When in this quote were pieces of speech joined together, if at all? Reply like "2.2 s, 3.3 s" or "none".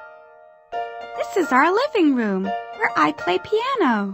1.2 s

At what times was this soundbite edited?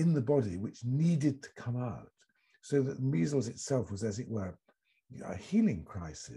none

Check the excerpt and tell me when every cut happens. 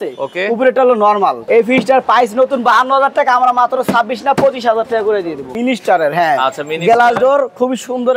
1.4 s, 5.5 s

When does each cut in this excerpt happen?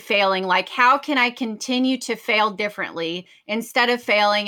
none

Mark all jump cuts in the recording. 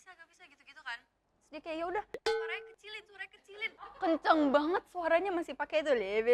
3.7 s

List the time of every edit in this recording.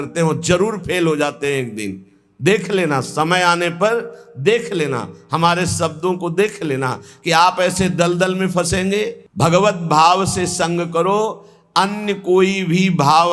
9.2 s

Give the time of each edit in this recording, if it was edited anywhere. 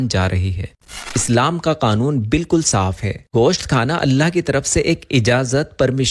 1.1 s

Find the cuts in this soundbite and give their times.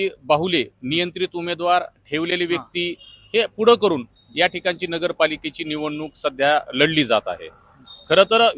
none

